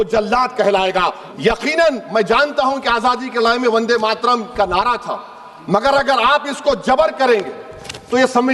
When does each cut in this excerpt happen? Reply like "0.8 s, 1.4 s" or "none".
1.2 s